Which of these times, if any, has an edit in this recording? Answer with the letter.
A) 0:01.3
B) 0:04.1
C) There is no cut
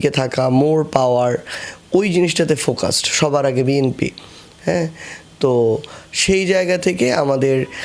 C